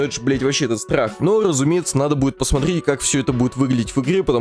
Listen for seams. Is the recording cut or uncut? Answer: uncut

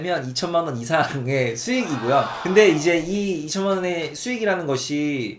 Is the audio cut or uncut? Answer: uncut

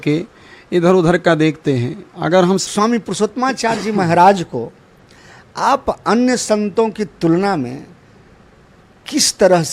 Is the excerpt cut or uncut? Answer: cut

